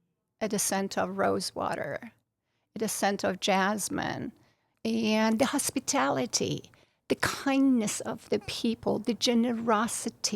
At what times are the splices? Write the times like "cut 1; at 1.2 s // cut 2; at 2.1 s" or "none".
cut 1; at 4.7 s